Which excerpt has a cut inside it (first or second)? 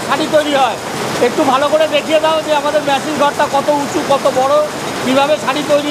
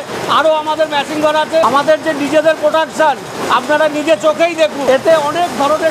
second